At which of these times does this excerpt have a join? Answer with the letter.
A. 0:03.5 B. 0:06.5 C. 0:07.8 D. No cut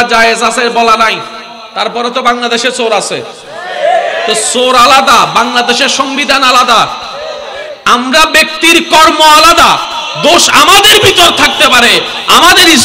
D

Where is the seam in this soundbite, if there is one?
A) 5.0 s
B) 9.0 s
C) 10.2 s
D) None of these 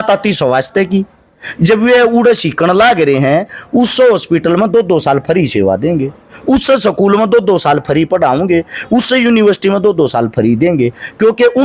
D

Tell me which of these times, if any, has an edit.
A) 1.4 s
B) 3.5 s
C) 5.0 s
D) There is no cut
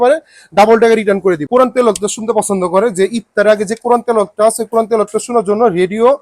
A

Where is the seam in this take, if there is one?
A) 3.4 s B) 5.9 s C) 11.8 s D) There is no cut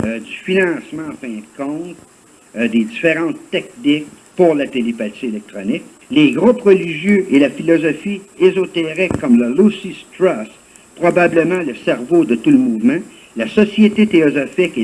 B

